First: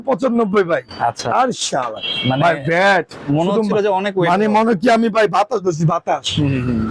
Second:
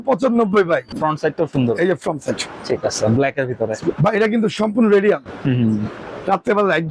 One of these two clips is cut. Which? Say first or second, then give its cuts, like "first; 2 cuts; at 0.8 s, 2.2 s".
second; 1 cut; at 0.9 s